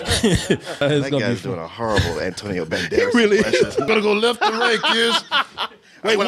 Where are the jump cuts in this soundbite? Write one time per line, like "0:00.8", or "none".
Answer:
0:00.8
0:03.9